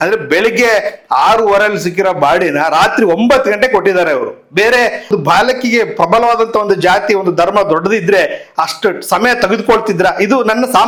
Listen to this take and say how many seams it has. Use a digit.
0